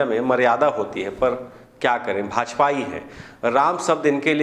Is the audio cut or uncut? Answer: uncut